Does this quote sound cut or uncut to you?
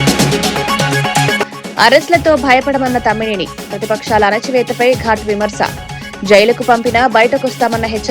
cut